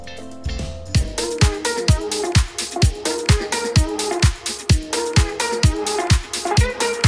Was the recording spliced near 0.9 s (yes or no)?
yes